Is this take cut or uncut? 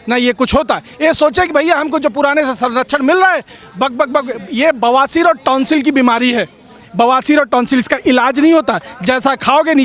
uncut